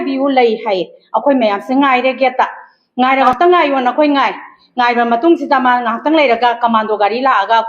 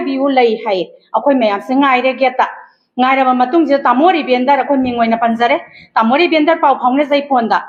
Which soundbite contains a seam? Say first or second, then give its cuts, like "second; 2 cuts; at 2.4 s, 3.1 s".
first; 1 cut; at 3.3 s